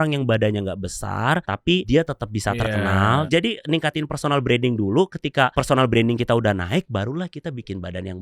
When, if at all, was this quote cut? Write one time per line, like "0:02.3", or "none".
0:01.8
0:03.3
0:05.6